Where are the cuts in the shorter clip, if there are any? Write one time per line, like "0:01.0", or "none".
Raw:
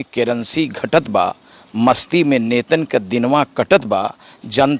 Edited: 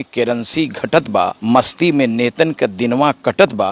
0:01.4